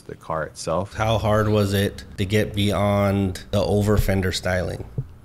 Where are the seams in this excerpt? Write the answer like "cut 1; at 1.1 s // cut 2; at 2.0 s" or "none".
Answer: cut 1; at 0.9 s // cut 2; at 2.1 s // cut 3; at 3.4 s